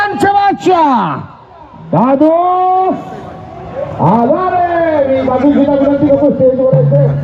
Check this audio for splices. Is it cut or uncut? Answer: uncut